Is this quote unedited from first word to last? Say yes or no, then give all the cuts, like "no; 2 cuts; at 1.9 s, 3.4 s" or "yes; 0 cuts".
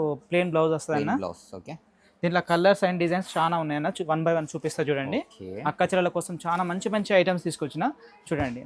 yes; 0 cuts